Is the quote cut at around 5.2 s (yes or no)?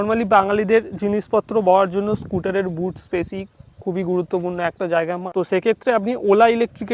yes